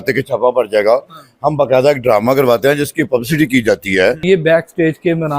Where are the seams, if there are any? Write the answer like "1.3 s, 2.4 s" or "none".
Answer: 4.2 s